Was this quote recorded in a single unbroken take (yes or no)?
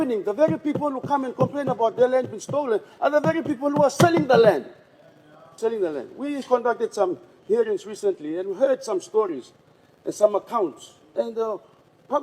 no